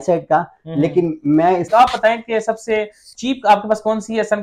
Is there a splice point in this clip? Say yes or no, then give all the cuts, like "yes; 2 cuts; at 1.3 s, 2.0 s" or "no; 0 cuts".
yes; 1 cut; at 1.6 s